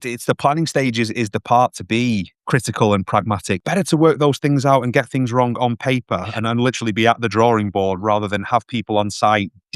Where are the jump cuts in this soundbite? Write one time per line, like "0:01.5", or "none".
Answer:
0:02.3
0:03.6